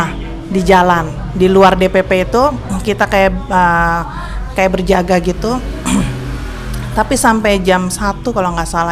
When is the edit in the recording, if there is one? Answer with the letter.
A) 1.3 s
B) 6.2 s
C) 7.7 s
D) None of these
D